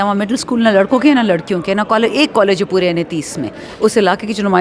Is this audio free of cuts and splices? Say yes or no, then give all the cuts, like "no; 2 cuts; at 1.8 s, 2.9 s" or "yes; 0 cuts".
no; 1 cut; at 3.6 s